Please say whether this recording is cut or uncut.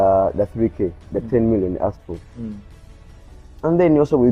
uncut